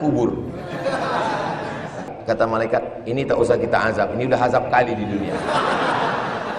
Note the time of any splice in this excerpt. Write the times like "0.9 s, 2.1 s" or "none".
2.1 s